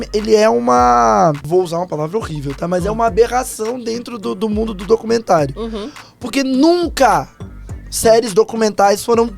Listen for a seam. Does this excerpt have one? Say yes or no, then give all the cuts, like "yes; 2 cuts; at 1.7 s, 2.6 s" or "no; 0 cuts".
yes; 1 cut; at 1.4 s